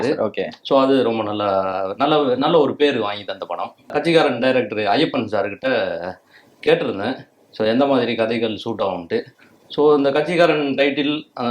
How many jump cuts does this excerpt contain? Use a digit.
1